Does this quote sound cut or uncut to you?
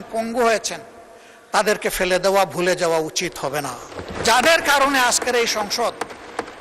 cut